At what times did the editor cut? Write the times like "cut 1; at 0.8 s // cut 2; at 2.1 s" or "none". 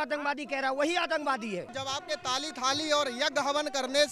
cut 1; at 1.8 s